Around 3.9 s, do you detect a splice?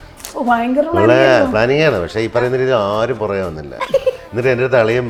no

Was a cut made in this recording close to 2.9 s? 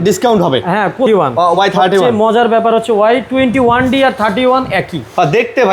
no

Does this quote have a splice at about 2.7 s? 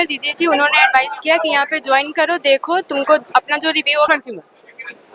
no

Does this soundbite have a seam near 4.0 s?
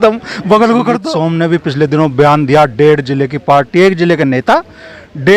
no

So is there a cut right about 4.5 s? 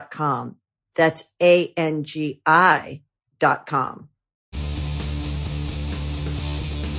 yes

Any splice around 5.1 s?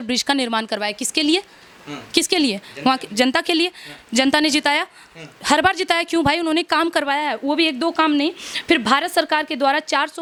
no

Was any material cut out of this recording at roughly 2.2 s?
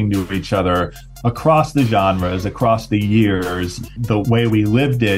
no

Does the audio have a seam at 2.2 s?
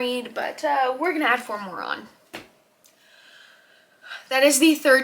yes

